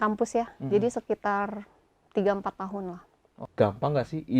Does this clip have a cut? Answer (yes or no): yes